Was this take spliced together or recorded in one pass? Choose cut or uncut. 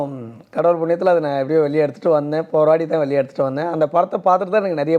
uncut